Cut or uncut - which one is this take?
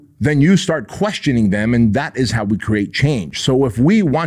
uncut